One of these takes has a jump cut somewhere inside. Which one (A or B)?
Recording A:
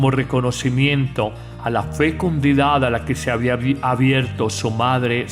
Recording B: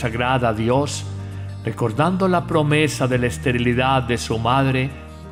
A